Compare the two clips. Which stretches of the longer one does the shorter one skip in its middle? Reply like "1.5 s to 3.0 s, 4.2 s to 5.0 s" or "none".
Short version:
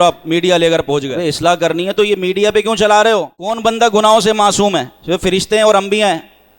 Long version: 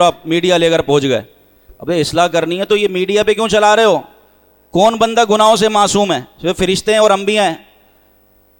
1.1 s to 1.8 s, 4.3 s to 4.9 s